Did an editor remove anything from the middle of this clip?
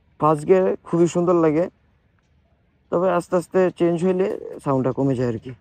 no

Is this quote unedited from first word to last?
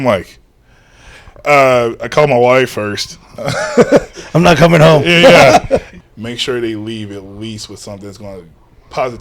no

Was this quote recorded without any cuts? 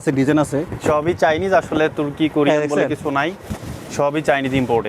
yes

